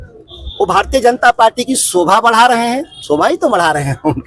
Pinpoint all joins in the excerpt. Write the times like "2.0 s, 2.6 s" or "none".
2.9 s